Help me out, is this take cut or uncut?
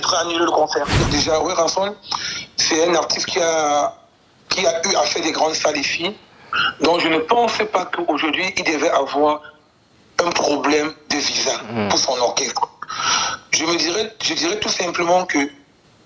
cut